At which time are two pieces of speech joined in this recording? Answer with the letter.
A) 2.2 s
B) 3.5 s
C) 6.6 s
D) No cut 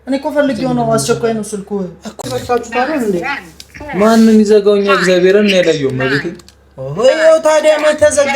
A